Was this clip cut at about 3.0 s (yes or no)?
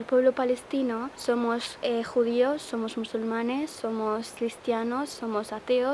no